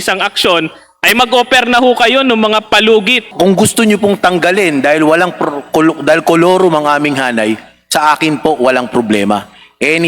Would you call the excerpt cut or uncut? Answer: cut